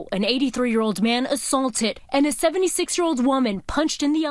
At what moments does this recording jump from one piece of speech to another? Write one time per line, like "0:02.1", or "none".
0:02.0

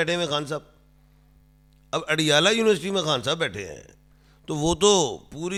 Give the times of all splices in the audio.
none

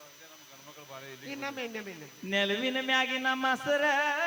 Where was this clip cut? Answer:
none

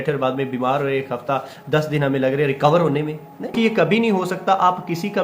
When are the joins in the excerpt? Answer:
0:03.5

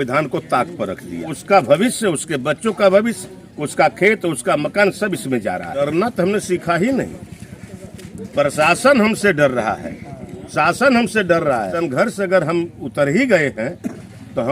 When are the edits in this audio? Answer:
0:01.3
0:05.8
0:11.7

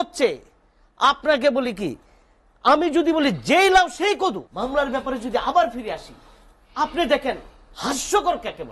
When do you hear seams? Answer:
0:04.5

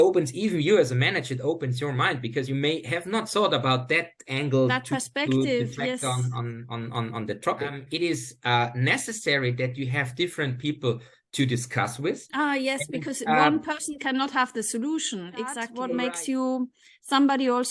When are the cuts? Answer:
0:07.8
0:15.7

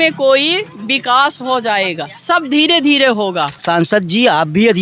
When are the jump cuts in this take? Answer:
0:03.6

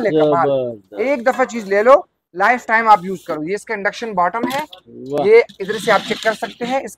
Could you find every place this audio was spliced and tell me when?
none

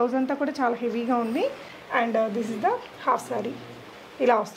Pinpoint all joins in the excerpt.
0:01.7

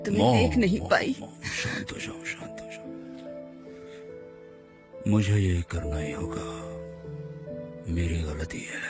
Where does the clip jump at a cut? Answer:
none

